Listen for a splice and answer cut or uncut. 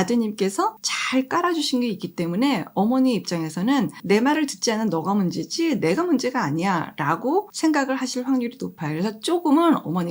cut